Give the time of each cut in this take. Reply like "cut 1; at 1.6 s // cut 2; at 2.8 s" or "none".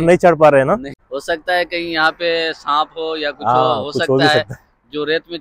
cut 1; at 0.9 s

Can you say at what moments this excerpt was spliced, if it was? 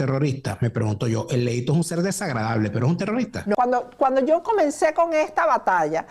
cut 1; at 3.5 s

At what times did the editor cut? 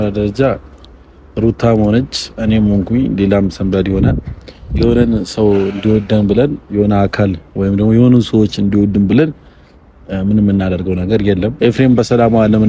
cut 1; at 11.5 s

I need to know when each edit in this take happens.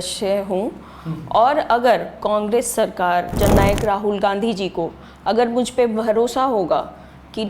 cut 1; at 3.3 s

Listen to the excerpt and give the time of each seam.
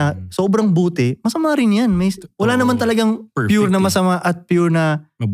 none

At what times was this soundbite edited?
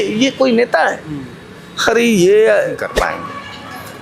cut 1; at 2.9 s

